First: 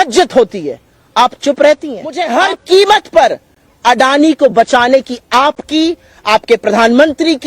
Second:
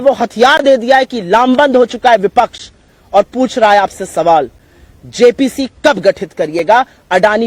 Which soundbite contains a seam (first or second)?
first